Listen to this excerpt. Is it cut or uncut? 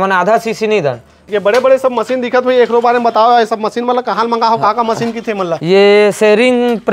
cut